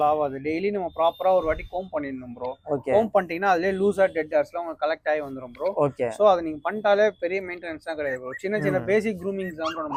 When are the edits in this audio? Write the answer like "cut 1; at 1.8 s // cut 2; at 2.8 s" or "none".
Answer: none